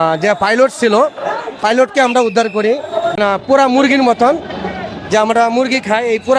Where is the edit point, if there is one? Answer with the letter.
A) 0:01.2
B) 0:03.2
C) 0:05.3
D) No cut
B